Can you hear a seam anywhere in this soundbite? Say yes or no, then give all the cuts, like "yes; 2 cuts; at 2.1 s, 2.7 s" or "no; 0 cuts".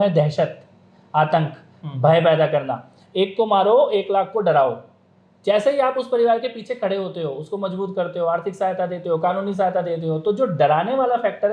no; 0 cuts